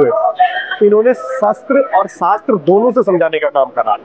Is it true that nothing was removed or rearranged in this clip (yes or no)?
yes